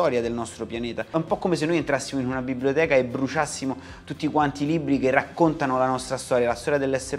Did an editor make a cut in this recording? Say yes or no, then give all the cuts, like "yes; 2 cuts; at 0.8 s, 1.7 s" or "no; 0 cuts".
yes; 1 cut; at 1.0 s